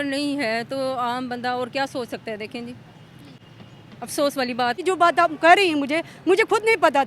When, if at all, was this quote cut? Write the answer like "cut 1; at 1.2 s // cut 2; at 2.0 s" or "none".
cut 1; at 4.8 s